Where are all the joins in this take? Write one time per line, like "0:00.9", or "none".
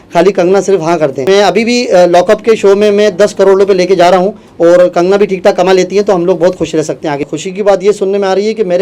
0:01.2
0:07.3